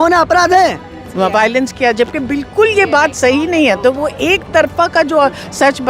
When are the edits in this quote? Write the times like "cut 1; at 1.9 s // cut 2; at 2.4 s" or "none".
cut 1; at 1.1 s